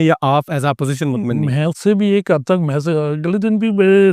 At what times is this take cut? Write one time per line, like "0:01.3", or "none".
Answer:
none